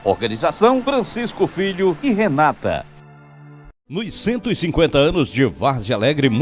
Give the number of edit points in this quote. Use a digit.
1